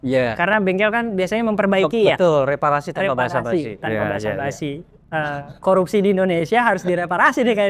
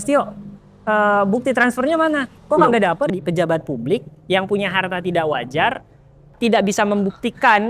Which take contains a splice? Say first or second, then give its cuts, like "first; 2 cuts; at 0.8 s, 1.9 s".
second; 3 cuts; at 2.3 s, 3.1 s, 6.3 s